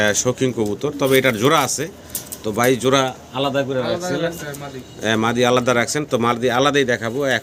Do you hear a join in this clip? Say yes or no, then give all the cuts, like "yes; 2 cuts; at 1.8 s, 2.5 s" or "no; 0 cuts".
no; 0 cuts